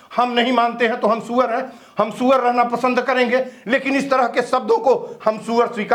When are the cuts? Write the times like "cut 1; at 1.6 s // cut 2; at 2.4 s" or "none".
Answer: none